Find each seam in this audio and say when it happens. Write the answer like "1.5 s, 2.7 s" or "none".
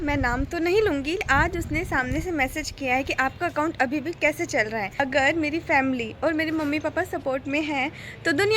1.2 s, 5.0 s